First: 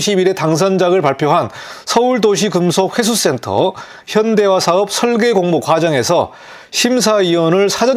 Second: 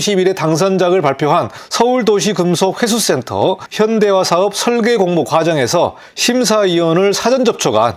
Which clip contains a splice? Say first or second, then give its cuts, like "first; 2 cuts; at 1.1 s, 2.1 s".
second; 3 cuts; at 1.6 s, 3.6 s, 6.1 s